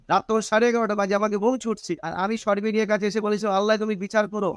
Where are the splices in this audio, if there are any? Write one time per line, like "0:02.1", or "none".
0:02.1